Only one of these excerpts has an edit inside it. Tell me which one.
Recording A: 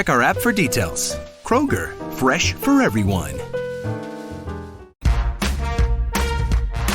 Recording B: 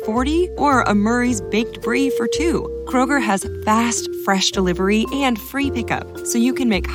A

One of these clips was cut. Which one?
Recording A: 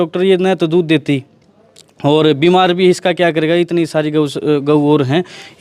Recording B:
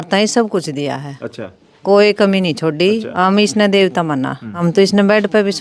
B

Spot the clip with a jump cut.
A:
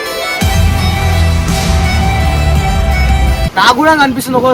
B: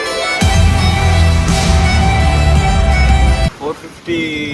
A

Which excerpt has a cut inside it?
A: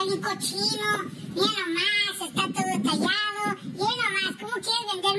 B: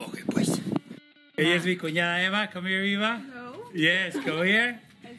B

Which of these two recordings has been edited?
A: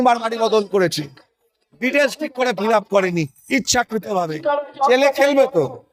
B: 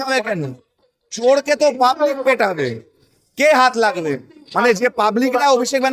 A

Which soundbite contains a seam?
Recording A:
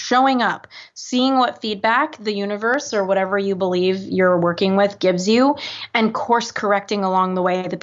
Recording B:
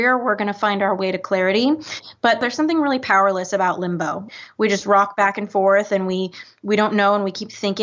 B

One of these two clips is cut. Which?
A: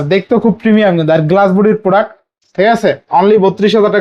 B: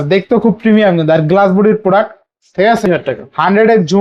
B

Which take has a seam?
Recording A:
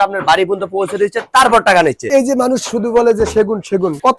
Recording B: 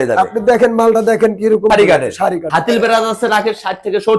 B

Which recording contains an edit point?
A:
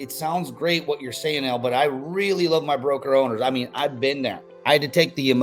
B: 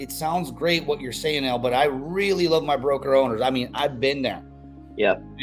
A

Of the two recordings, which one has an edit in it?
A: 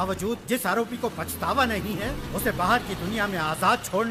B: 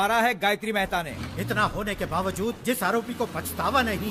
B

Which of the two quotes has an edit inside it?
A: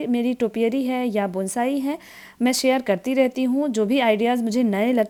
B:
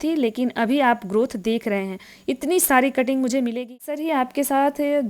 B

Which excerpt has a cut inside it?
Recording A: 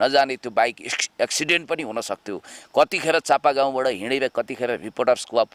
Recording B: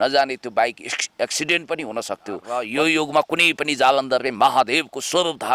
B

